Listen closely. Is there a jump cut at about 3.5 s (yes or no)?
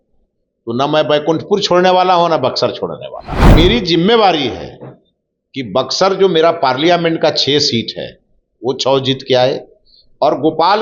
yes